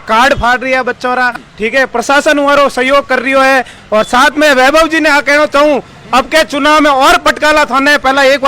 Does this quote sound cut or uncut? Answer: cut